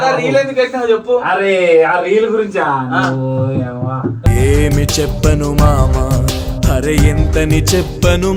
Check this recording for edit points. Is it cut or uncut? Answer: uncut